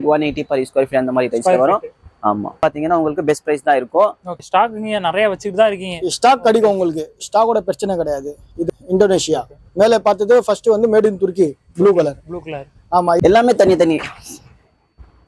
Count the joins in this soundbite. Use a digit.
4